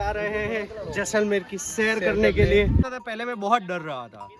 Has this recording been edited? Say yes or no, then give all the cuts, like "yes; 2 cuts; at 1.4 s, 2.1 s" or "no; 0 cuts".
yes; 1 cut; at 3.0 s